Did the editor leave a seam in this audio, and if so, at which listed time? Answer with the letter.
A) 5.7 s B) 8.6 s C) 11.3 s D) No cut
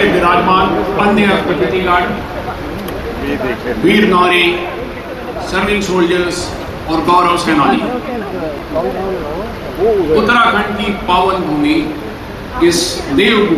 D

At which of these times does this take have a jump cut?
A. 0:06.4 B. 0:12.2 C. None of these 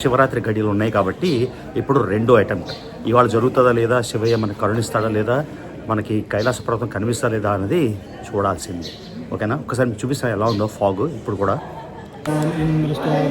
B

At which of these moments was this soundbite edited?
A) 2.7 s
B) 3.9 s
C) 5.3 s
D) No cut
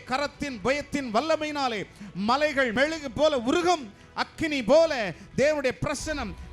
A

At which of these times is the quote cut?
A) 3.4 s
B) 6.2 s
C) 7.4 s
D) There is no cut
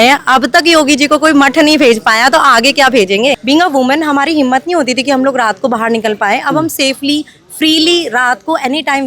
A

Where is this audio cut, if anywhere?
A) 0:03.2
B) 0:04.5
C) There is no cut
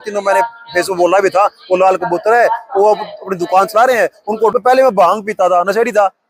B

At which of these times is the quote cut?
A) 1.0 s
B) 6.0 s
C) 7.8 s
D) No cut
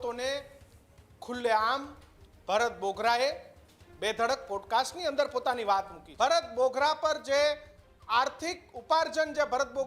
B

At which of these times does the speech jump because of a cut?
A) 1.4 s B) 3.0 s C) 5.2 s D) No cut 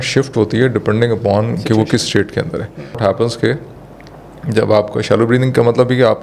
B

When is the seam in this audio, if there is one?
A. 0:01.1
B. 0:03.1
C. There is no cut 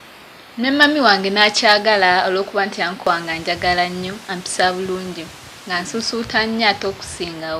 B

